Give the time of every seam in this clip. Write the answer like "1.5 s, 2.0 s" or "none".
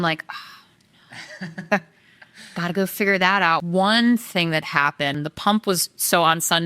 3.6 s, 5.2 s

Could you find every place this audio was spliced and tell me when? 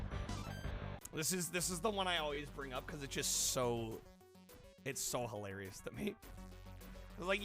0.9 s

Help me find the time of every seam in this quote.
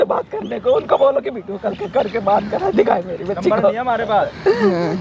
none

